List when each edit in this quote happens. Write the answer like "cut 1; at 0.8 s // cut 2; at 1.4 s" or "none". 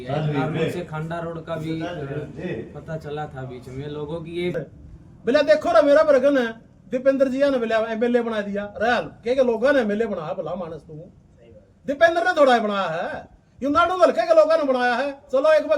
cut 1; at 4.6 s